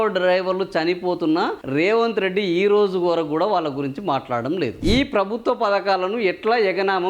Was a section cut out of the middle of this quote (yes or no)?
yes